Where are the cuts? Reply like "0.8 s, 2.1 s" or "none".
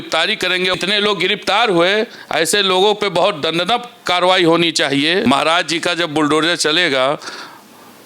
0.7 s, 5.2 s